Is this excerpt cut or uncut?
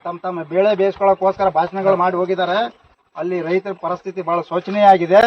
uncut